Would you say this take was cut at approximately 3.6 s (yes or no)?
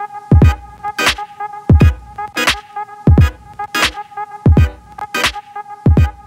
no